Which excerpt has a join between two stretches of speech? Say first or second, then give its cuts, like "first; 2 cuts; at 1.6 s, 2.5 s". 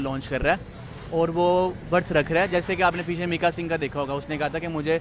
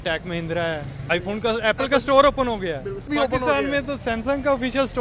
second; 2 cuts; at 1.0 s, 3.0 s